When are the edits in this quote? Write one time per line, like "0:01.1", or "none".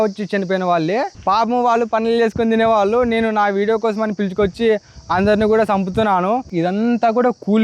0:01.1
0:06.5

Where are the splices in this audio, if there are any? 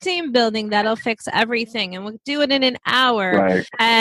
none

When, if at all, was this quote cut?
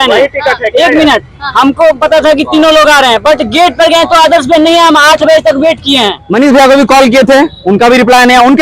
0:06.2

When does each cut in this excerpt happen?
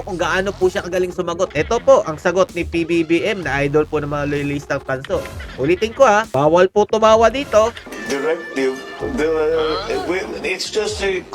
0:01.5
0:07.9

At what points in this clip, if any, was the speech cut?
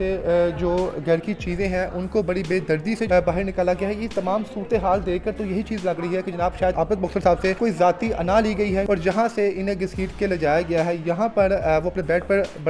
0:03.0
0:06.7
0:07.6
0:08.8

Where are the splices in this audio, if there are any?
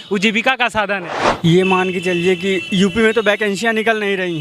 0:01.1

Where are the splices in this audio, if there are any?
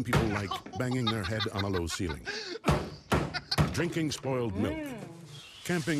none

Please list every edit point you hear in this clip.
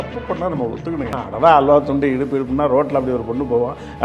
0:01.2

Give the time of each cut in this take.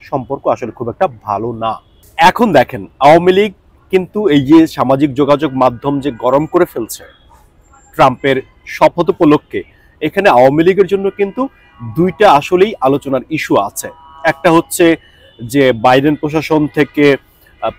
none

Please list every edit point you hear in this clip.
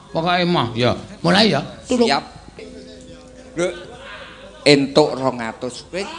0:02.5

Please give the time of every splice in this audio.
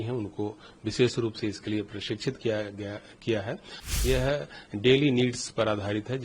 0:03.9

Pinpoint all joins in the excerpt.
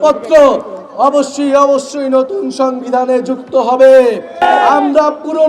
0:04.4

